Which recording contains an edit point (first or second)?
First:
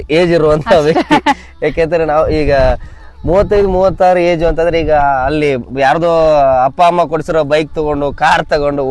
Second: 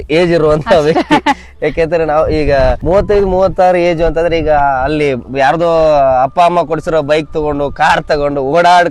second